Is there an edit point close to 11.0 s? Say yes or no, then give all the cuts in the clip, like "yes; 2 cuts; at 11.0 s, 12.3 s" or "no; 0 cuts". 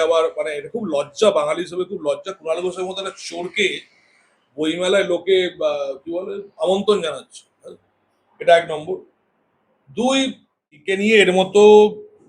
yes; 1 cut; at 11.0 s